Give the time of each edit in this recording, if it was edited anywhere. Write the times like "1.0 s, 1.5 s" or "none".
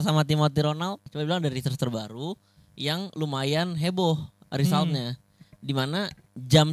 1.1 s